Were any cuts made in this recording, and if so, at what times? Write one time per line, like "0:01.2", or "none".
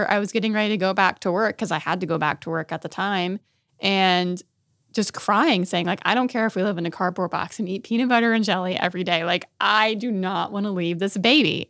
none